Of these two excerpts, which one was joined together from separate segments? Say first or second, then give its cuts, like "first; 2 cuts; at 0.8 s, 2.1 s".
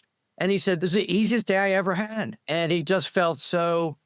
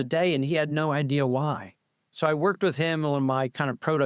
first; 2 cuts; at 0.8 s, 2.4 s